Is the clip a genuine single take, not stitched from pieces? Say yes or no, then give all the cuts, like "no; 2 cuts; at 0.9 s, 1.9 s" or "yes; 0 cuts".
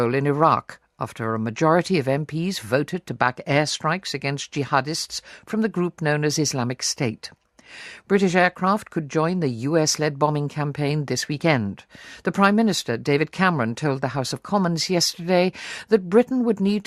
yes; 0 cuts